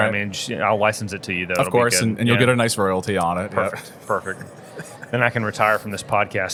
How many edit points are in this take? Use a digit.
0